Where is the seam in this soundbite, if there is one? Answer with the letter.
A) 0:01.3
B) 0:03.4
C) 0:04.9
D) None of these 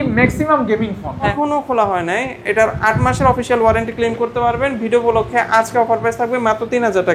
A